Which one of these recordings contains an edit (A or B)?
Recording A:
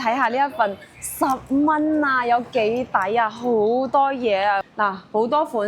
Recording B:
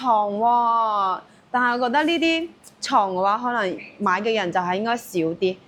A